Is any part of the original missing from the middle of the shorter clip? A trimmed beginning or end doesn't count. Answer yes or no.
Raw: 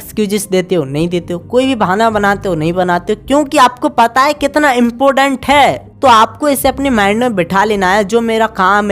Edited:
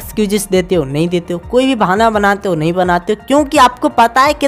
no